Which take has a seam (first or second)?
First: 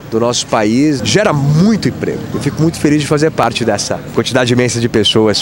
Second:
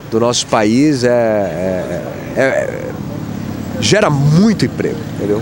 first